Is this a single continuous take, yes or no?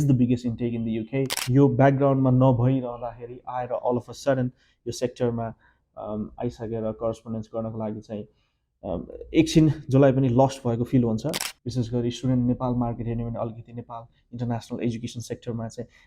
no